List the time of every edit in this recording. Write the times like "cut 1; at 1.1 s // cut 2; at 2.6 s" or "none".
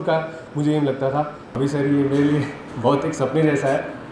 cut 1; at 1.4 s